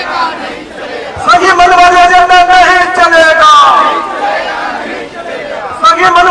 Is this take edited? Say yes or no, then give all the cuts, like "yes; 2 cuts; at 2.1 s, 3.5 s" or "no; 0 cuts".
no; 0 cuts